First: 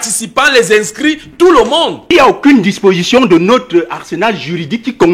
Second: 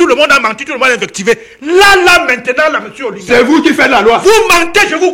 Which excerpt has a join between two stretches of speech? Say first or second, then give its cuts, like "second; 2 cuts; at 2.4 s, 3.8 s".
first; 1 cut; at 2.1 s